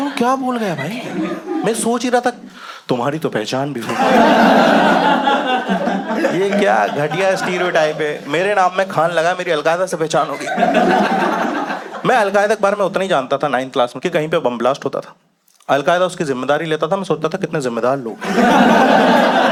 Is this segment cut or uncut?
uncut